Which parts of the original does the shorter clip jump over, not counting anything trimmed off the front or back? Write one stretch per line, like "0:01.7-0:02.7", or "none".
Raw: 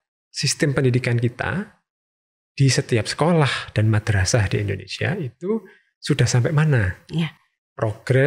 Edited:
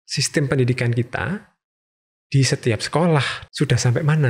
0:03.6-0:05.9